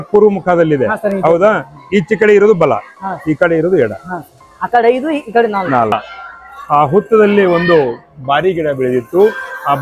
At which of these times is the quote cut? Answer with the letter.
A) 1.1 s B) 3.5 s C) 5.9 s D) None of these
C